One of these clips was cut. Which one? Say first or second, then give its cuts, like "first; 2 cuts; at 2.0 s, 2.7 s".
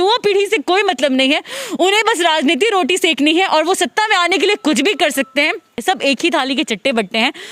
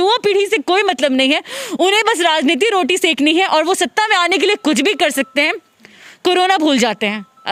first; 1 cut; at 5.8 s